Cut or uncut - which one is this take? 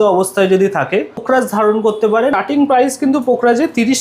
cut